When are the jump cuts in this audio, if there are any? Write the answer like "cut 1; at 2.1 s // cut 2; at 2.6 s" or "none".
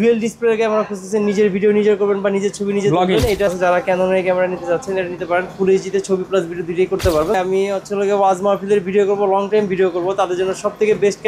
cut 1; at 3.5 s // cut 2; at 7.4 s